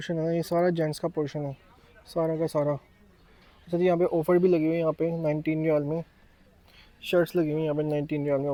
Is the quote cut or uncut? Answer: uncut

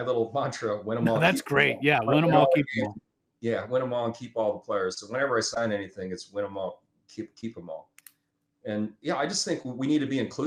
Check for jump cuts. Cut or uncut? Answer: uncut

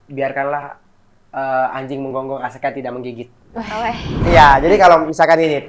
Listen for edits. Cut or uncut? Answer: cut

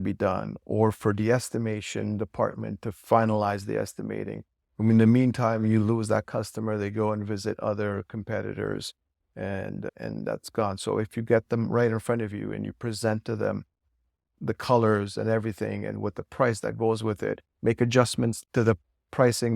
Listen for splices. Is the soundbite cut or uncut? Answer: cut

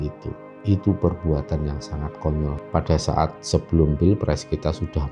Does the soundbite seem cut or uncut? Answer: cut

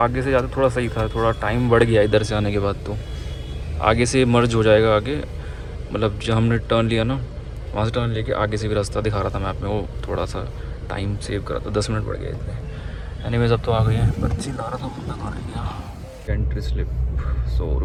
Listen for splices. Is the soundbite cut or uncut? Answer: uncut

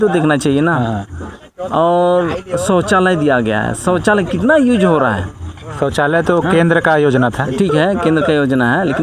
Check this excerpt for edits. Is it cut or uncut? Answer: uncut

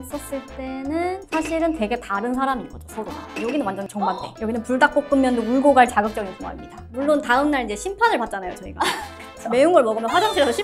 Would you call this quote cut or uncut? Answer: cut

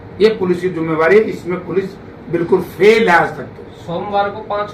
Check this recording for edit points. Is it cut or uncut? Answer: uncut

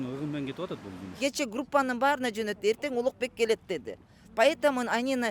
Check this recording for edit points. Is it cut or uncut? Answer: cut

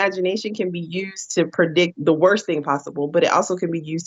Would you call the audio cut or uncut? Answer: uncut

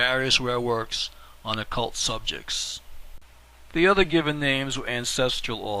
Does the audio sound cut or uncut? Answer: cut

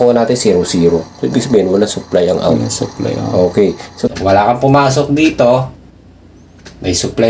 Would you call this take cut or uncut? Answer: cut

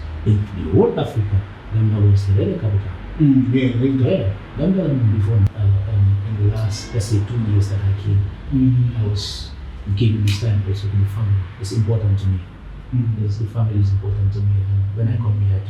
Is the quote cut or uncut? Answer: cut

